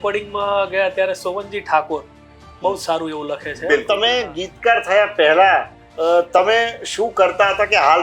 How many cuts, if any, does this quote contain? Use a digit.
1